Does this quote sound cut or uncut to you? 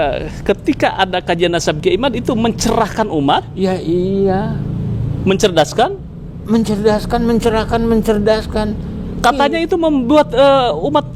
uncut